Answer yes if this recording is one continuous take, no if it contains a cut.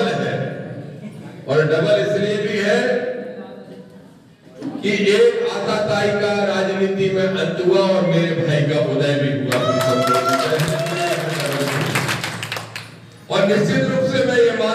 yes